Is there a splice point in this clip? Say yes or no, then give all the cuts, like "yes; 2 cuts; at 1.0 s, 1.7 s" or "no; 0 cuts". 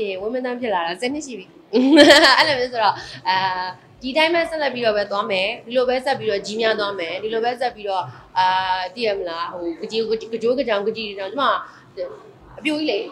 no; 0 cuts